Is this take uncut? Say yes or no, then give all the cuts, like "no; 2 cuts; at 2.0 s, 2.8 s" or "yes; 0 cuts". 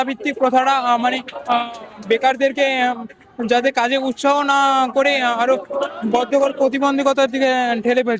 yes; 0 cuts